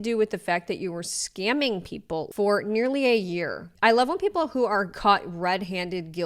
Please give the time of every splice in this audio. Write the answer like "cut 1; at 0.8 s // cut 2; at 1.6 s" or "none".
cut 1; at 2.3 s // cut 2; at 3.6 s